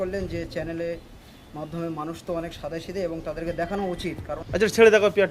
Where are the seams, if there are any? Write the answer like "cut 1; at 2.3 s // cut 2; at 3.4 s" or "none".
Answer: cut 1; at 4.3 s